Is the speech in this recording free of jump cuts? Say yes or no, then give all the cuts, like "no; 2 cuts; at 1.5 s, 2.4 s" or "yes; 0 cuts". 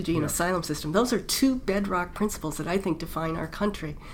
yes; 0 cuts